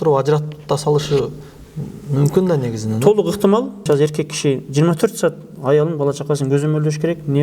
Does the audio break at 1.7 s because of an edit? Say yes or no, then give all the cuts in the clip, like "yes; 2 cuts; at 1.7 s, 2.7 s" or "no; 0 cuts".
no; 1 cut; at 3.8 s